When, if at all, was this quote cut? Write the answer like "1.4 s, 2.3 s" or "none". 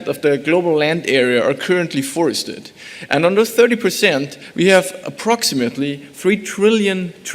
4.4 s